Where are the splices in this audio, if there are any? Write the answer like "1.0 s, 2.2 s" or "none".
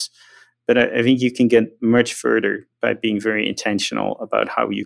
none